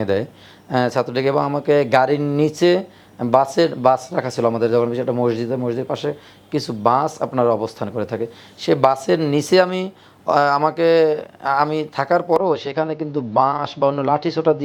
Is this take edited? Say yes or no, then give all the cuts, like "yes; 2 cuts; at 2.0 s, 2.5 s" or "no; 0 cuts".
no; 0 cuts